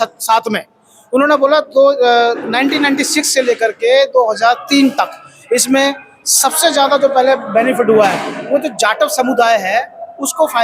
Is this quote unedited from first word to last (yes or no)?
yes